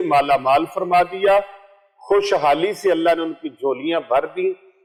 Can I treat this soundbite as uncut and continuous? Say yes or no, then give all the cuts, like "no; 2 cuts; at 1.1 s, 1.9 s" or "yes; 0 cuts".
yes; 0 cuts